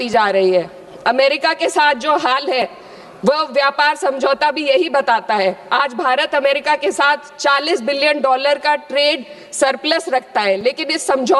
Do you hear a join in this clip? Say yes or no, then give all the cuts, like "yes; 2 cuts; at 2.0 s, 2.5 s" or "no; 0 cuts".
no; 0 cuts